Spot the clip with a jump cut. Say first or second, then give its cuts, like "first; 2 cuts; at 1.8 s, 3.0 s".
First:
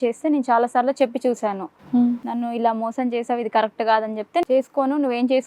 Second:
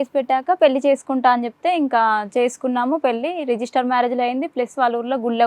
first; 1 cut; at 4.4 s